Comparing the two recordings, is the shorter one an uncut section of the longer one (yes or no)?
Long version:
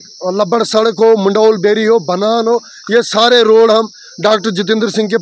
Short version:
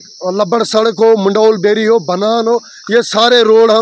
yes